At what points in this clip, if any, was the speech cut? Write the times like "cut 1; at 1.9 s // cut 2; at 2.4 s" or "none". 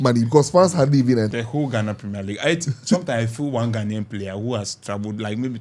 cut 1; at 1.3 s